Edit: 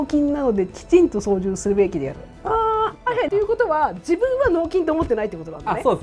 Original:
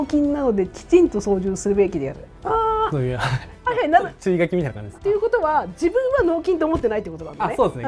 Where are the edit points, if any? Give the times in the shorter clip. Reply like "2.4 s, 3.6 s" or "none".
3.0 s

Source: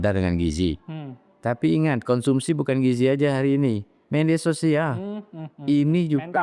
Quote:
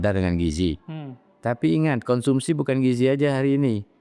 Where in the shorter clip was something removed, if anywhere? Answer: none

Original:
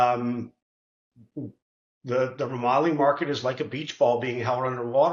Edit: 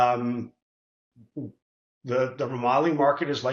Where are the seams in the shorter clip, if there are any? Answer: none

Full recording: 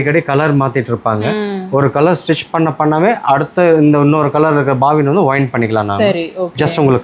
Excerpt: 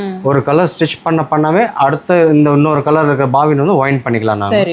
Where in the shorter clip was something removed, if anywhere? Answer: none

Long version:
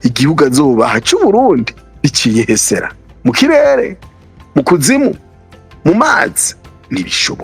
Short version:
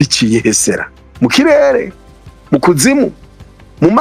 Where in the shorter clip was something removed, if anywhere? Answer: none

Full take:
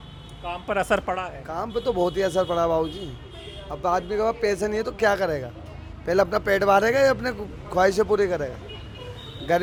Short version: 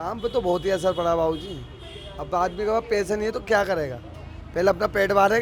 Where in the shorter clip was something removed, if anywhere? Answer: none

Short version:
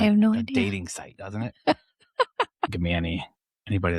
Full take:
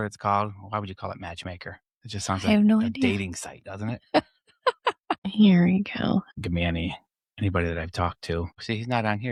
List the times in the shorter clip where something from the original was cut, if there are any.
2.7 s

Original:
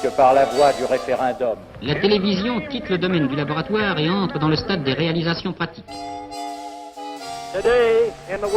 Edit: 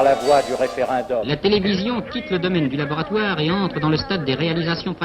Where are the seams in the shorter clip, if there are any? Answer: 1.3 s

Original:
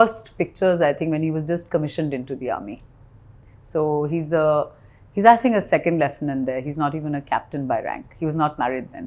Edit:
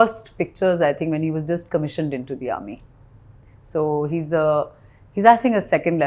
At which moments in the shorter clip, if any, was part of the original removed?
none

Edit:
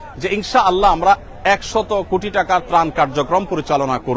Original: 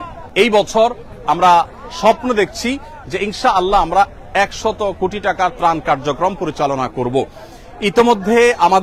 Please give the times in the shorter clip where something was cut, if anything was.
none

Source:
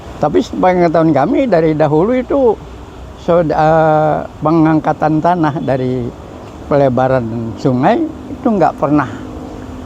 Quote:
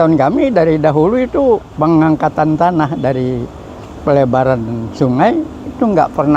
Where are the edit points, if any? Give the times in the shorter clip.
1.7 s

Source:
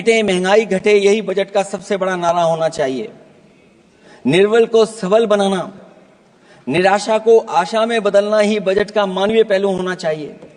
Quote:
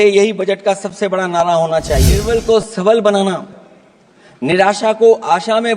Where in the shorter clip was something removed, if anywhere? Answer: 2.2 s

